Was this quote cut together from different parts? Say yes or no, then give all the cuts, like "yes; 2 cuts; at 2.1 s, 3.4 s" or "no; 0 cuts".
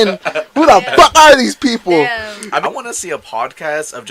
yes; 1 cut; at 2.6 s